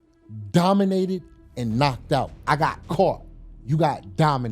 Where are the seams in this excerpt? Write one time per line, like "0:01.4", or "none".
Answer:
0:02.4